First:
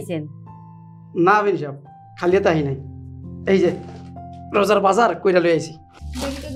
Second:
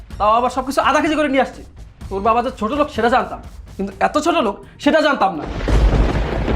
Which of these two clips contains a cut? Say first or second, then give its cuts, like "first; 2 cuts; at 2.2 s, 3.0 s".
second; 1 cut; at 5.4 s